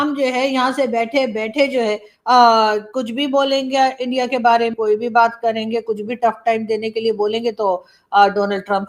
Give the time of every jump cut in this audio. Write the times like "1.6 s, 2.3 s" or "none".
4.7 s